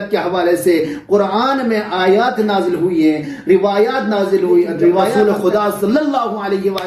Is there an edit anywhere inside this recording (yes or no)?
yes